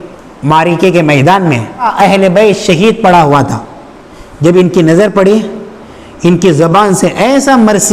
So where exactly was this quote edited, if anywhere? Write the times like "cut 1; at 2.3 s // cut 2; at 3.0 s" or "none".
cut 1; at 1.9 s